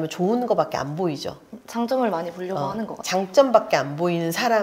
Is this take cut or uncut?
cut